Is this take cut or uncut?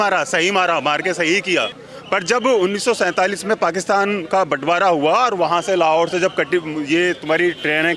cut